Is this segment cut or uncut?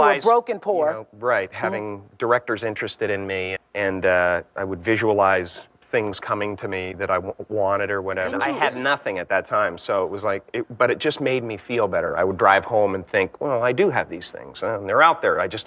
cut